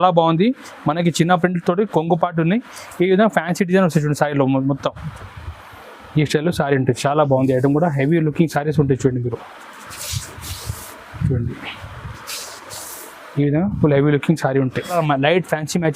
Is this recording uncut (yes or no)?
no